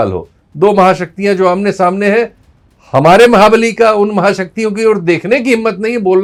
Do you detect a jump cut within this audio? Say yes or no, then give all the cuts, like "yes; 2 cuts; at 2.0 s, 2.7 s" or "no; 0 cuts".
no; 0 cuts